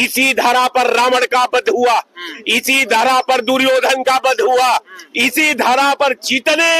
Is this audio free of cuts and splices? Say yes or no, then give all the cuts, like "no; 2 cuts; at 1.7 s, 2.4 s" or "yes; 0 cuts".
yes; 0 cuts